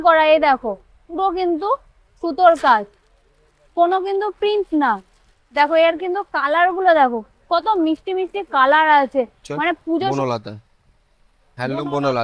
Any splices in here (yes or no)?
yes